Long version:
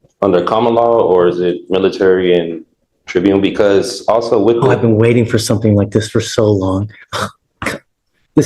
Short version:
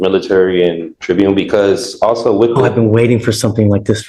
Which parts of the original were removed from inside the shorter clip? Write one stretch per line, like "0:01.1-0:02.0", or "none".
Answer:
0:02.6-0:03.0